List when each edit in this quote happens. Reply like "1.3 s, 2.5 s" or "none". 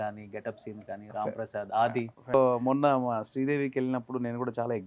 2.3 s